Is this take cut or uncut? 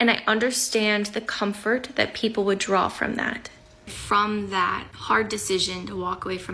cut